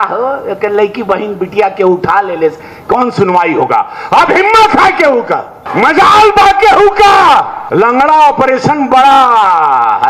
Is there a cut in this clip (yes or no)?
yes